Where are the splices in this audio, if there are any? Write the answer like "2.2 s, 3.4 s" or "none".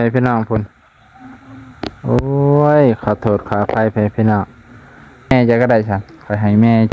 5.3 s